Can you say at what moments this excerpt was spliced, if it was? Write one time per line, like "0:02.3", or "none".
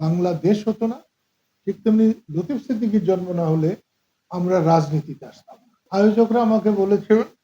0:05.8